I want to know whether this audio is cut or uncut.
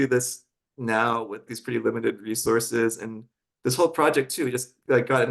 cut